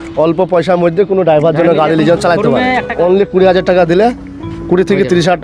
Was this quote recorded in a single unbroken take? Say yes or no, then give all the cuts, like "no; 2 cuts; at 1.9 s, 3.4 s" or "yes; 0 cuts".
no; 1 cut; at 2.8 s